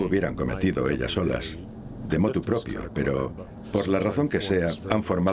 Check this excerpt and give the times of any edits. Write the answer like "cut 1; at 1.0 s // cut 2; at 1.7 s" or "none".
cut 1; at 3.6 s